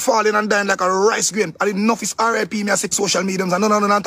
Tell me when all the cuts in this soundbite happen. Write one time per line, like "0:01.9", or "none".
0:02.9